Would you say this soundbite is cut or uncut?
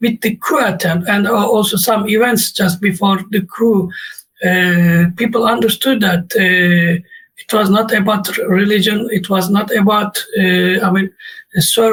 uncut